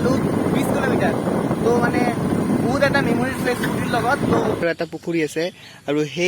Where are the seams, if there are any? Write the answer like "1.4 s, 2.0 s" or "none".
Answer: 4.6 s